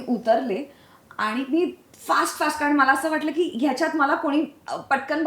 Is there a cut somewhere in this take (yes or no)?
no